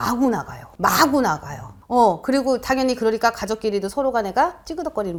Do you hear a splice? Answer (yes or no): no